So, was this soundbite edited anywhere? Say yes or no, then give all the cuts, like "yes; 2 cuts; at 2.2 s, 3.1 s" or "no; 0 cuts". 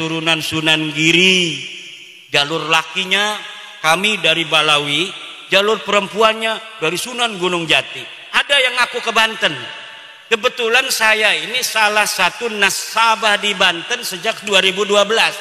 no; 0 cuts